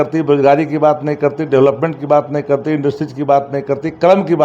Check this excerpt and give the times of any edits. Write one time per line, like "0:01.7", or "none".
none